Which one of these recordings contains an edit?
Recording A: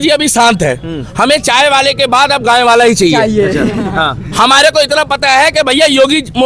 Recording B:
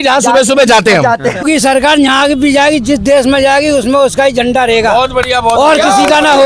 B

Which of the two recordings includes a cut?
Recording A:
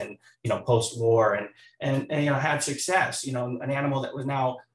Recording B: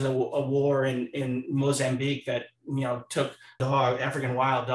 B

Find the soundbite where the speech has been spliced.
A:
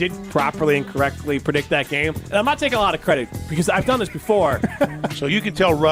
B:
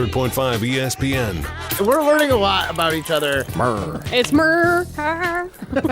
B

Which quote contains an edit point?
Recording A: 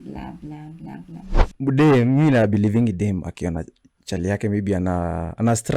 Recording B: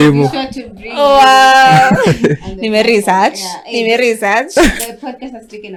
A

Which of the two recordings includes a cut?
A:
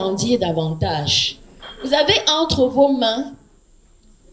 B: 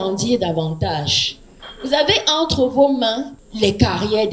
B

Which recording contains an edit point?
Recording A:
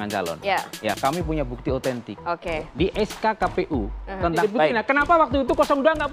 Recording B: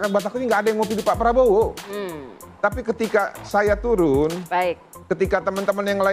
A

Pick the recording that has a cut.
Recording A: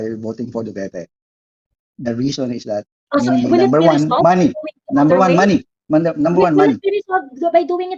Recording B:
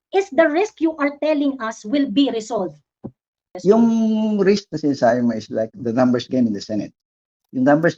B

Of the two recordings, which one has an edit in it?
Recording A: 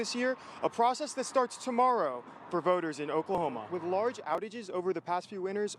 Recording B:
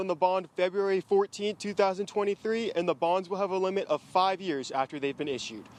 A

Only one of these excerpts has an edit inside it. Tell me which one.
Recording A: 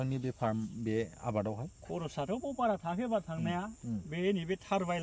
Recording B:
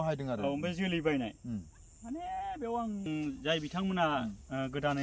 B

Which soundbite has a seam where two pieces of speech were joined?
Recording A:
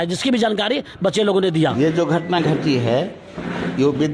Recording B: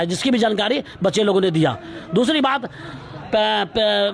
A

